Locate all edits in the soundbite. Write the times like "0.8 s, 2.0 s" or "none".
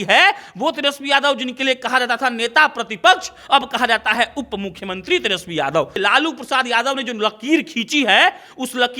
6.0 s